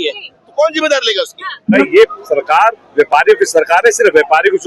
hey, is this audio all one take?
no; 1 cut; at 1.8 s

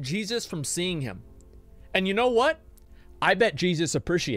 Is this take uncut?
yes; 0 cuts

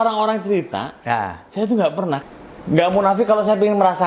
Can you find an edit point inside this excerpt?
yes; 1 cut; at 2.2 s

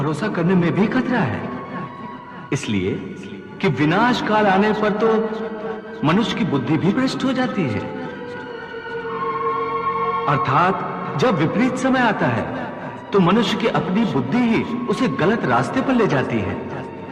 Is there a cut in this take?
no; 0 cuts

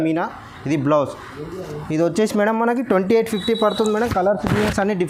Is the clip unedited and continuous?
yes; 0 cuts

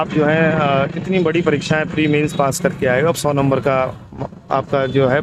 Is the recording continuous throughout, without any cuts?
yes; 0 cuts

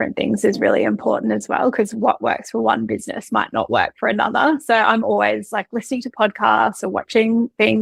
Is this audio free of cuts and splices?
yes; 0 cuts

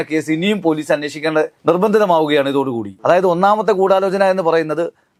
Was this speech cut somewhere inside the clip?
no; 0 cuts

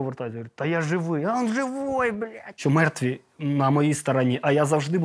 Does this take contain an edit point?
yes; 1 cut; at 2.6 s

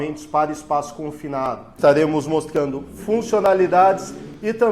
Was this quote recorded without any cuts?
no; 1 cut; at 1.7 s

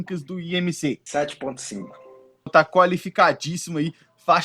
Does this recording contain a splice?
yes; 2 cuts; at 1.0 s, 2.5 s

